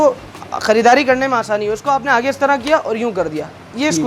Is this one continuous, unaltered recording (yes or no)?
yes